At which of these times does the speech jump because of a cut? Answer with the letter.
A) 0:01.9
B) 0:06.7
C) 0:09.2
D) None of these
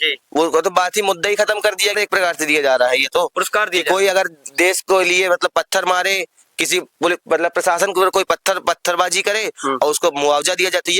A